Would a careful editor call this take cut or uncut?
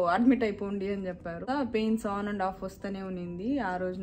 cut